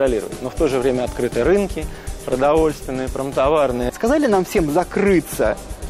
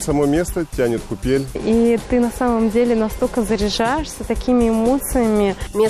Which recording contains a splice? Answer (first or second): first